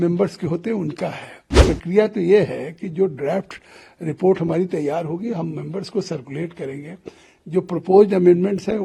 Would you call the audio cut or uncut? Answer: cut